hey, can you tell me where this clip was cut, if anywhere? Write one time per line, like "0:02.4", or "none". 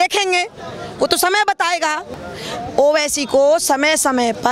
0:02.1